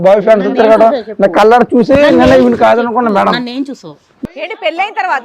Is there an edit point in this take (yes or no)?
yes